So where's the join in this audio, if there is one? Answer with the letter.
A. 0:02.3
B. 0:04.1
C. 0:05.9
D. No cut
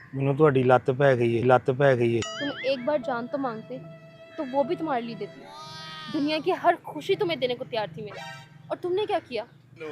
A